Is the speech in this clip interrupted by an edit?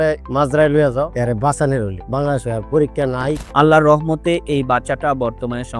yes; 2 cuts; at 1.1 s, 3.4 s

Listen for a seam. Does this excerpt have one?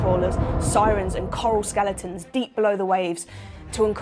no; 0 cuts

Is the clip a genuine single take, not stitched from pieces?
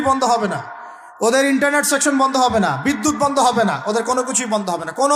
yes; 0 cuts

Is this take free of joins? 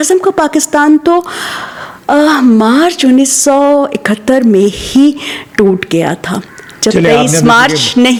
yes; 0 cuts

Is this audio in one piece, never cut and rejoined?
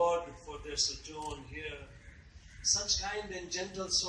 yes; 0 cuts

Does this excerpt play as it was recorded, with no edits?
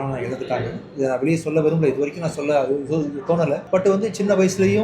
yes; 0 cuts

